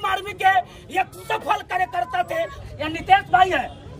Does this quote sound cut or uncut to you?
cut